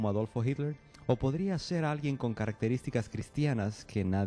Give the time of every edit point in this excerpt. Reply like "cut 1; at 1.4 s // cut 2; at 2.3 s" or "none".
cut 1; at 2.1 s